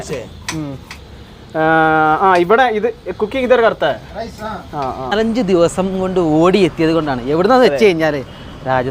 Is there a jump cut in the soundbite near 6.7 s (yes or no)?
no